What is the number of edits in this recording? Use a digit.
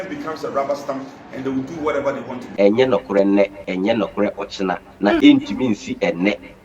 3